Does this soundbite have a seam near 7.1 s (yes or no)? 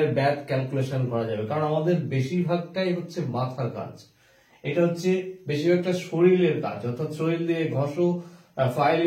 no